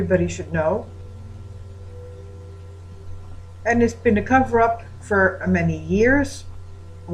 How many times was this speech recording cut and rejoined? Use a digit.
1